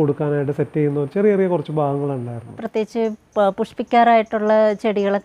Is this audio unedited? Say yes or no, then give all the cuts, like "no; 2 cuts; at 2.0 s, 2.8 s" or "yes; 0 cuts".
no; 1 cut; at 2.6 s